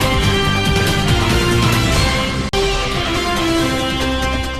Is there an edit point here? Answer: yes; 1 cut; at 2.5 s

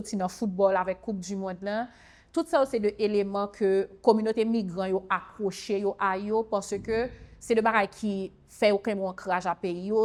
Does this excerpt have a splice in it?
no; 0 cuts

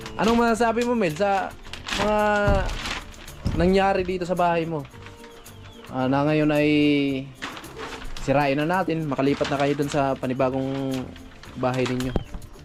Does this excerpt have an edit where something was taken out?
no; 0 cuts

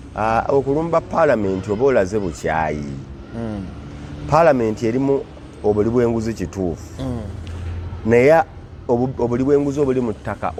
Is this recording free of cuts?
yes; 0 cuts

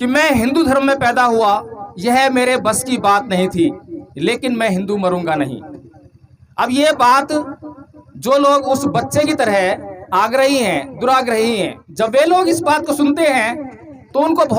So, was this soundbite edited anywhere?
no; 0 cuts

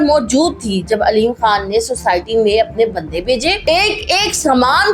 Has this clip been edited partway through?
yes; 1 cut; at 3.6 s

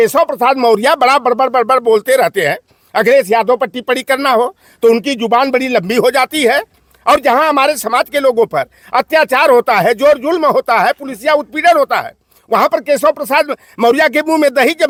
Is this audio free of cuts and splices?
yes; 0 cuts

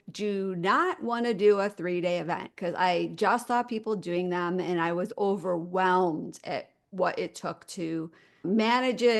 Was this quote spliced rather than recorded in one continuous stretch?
yes; 1 cut; at 8.3 s

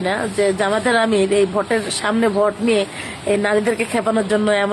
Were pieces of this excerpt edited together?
no; 0 cuts

